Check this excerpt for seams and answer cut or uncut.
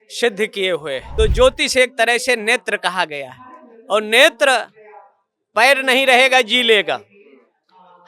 cut